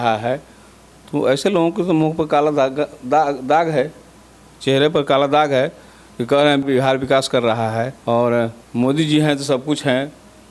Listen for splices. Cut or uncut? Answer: cut